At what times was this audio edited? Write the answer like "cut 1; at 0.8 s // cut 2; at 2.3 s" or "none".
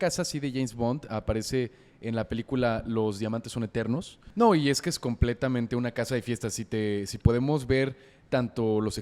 cut 1; at 4.2 s